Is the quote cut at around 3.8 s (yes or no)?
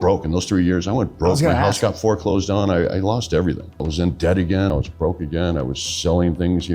yes